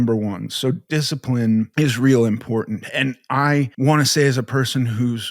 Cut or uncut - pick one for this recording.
cut